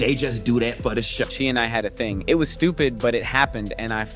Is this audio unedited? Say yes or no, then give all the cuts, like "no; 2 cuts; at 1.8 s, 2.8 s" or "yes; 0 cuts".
no; 1 cut; at 1.3 s